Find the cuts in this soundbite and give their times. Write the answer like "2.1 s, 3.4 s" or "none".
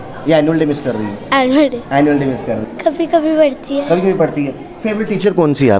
2.6 s